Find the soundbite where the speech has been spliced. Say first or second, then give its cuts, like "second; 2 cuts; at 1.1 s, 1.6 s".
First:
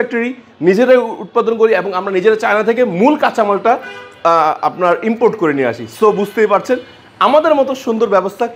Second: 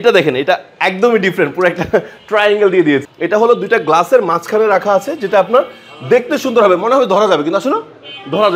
second; 1 cut; at 3.1 s